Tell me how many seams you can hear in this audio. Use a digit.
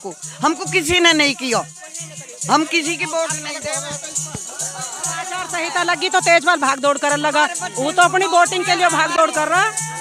1